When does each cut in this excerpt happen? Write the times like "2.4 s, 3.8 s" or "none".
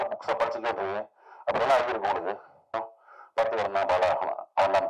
2.8 s